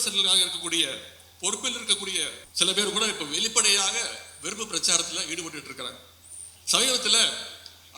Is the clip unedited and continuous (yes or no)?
no